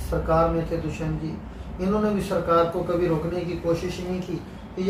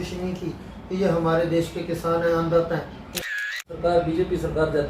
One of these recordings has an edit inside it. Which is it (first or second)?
second